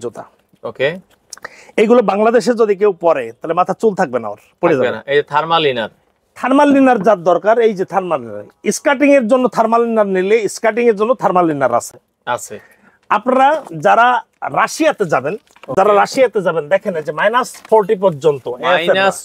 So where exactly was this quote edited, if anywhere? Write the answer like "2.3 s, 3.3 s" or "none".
none